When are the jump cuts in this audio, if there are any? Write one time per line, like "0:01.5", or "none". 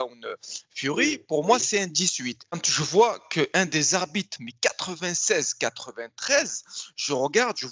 0:02.7